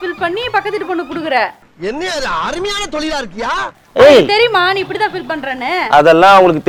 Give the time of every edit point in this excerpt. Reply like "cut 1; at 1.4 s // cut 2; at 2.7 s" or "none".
none

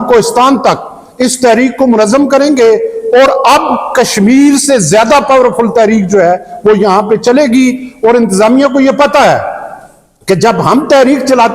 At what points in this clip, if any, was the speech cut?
none

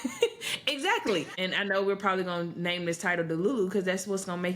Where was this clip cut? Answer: cut 1; at 1.3 s

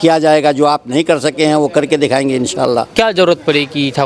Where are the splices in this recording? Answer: cut 1; at 2.9 s

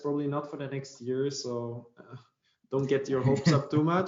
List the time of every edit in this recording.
none

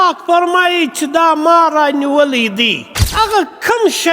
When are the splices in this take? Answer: cut 1; at 3.1 s

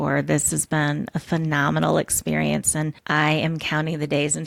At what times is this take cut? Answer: cut 1; at 3.0 s

